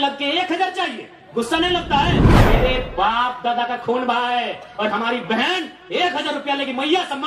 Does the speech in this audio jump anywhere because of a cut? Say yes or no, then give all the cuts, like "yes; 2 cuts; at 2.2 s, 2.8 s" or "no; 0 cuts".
yes; 1 cut; at 2.4 s